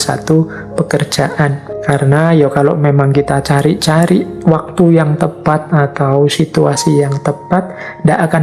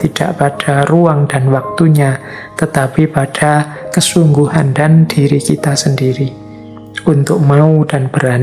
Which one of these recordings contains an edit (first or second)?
first